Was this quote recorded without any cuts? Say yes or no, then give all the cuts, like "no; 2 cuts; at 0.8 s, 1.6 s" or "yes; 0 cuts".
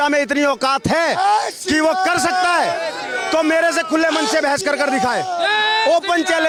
yes; 0 cuts